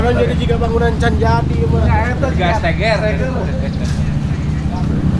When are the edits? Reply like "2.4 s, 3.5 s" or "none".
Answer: none